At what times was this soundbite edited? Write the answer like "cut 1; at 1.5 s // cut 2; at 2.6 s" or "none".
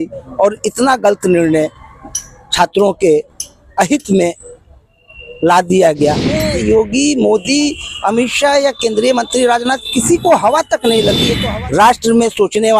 cut 1; at 6.4 s // cut 2; at 11.3 s